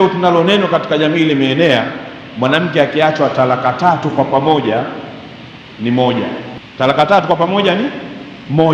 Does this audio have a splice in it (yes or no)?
yes